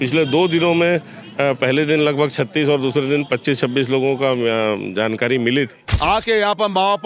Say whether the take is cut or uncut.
cut